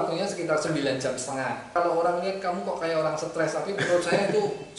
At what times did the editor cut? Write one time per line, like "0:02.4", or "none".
0:01.7